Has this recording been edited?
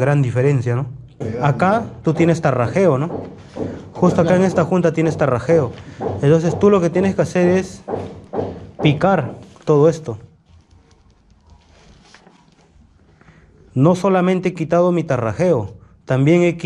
yes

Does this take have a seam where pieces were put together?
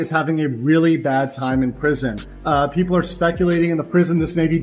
yes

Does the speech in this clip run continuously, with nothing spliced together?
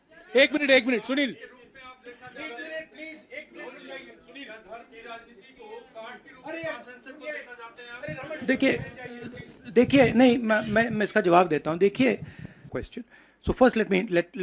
no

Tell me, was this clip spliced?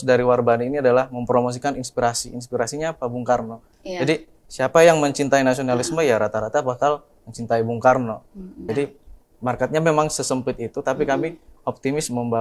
yes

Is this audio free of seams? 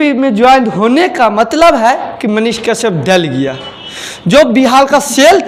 yes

